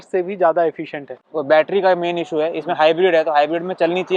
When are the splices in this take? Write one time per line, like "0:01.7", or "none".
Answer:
0:01.2